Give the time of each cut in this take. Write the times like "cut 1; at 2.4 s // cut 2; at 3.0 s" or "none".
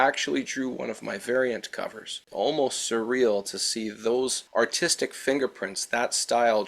cut 1; at 2.1 s

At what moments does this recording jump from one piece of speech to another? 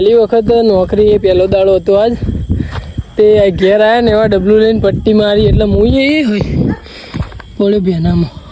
none

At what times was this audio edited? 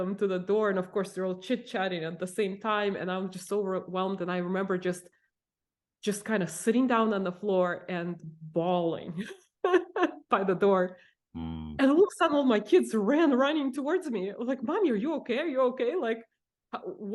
none

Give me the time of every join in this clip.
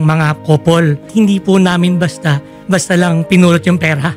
cut 1; at 1.1 s

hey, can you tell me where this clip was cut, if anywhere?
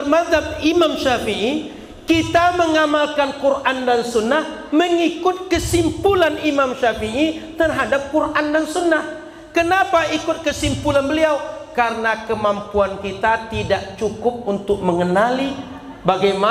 none

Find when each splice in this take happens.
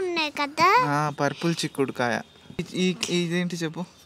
cut 1; at 2.7 s

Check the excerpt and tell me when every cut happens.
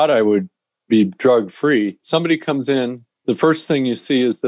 cut 1; at 2.0 s

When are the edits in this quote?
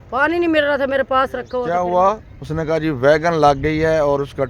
cut 1; at 1.7 s

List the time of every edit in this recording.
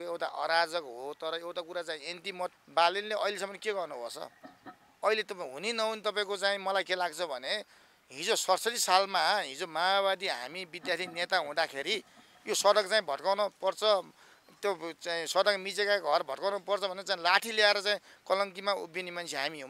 cut 1; at 2.5 s

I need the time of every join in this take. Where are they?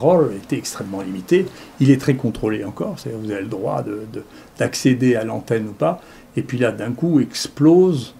none

